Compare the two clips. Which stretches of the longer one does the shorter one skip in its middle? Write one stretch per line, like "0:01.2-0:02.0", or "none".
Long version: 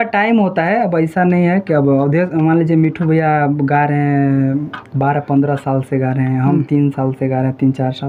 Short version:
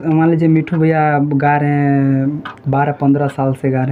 none